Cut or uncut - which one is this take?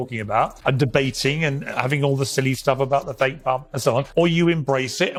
uncut